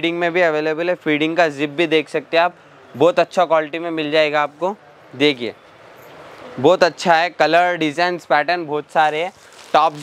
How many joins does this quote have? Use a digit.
0